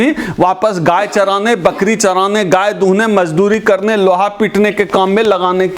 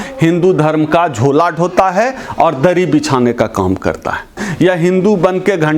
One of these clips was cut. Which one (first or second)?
second